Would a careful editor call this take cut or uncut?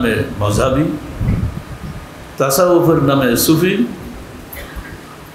uncut